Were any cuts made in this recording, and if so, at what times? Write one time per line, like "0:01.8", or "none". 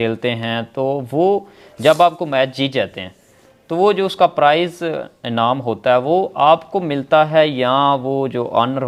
none